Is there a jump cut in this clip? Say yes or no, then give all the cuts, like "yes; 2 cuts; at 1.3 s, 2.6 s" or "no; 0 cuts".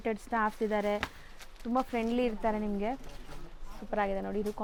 no; 0 cuts